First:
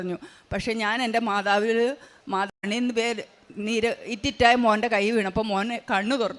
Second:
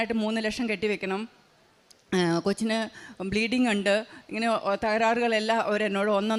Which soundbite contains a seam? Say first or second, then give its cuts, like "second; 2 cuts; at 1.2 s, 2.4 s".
first; 1 cut; at 2.5 s